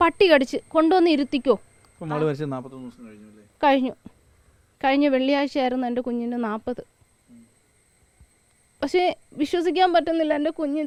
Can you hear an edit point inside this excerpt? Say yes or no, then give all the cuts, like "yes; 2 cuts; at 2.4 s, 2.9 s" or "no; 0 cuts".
no; 0 cuts